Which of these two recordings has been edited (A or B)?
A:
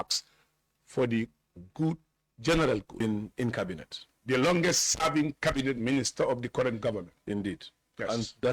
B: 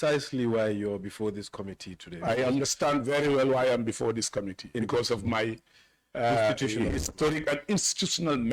A